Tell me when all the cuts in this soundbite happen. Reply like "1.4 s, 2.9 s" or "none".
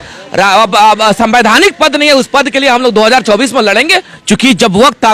4.0 s